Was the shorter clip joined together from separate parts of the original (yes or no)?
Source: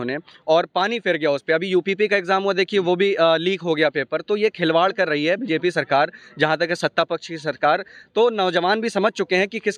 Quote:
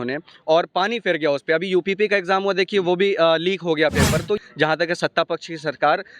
yes